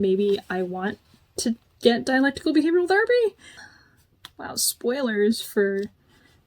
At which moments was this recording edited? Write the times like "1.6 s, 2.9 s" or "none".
none